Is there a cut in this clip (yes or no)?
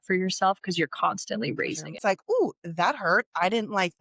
yes